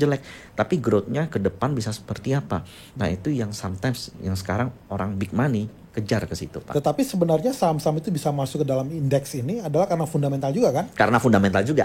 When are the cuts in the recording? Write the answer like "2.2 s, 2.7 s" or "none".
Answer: 6.5 s

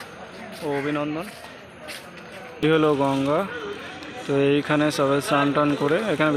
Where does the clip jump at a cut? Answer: 2.6 s

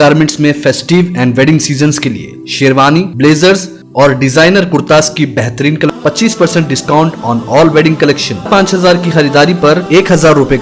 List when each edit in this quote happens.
5.9 s, 8.5 s

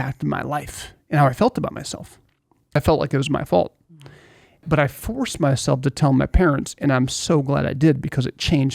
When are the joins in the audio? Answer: 2.8 s, 4.6 s

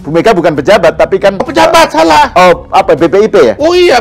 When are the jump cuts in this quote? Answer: 1.4 s

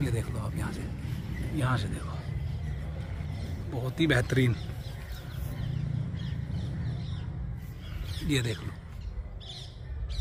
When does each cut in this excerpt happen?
none

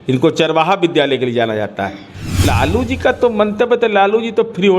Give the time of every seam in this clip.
2.4 s

